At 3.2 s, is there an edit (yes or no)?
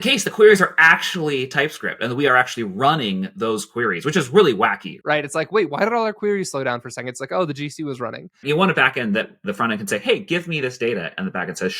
no